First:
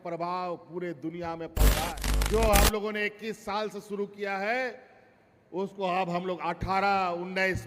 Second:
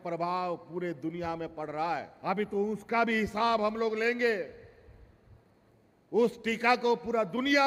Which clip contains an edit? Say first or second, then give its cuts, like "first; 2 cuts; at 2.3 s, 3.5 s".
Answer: first; 1 cut; at 1.9 s